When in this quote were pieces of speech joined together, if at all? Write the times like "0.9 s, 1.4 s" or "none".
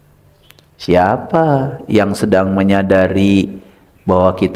none